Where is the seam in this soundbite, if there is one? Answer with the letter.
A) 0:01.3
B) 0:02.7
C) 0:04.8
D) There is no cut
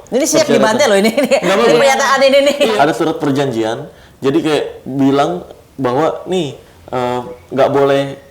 B